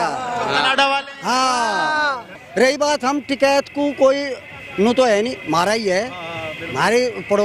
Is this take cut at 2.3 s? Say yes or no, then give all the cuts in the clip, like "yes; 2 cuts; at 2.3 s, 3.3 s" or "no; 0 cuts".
yes; 1 cut; at 2.3 s